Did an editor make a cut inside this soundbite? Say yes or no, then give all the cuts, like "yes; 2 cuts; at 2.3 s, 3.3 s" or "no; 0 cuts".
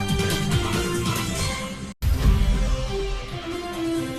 yes; 1 cut; at 2.0 s